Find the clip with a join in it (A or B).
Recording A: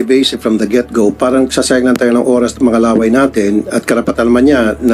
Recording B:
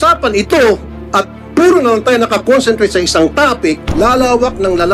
B